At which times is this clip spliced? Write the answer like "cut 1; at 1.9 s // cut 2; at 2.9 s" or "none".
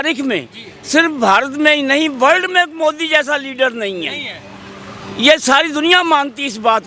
none